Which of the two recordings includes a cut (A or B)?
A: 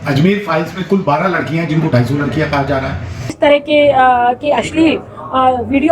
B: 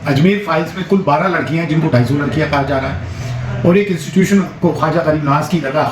A